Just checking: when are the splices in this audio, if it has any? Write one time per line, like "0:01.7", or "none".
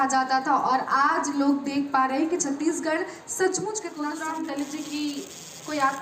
0:04.1